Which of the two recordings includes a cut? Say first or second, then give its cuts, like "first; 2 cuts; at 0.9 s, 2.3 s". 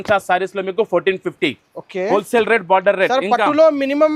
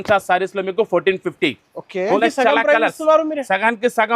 second; 1 cut; at 2.2 s